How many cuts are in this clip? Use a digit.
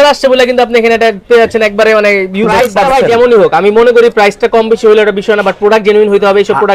1